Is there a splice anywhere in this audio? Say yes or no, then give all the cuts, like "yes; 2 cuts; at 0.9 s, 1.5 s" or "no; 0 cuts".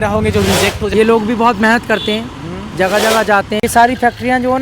yes; 2 cuts; at 0.8 s, 3.6 s